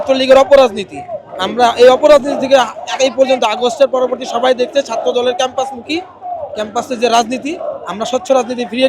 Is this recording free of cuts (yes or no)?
yes